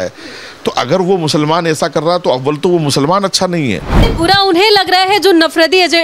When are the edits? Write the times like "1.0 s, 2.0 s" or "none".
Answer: 4.1 s